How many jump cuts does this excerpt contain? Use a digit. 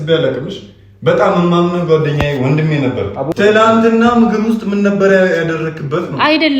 1